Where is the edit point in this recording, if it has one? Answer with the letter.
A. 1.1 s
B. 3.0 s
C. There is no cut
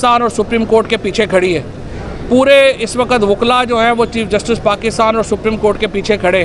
C